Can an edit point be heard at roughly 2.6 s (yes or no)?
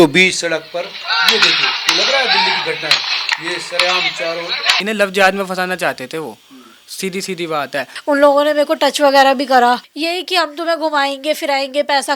no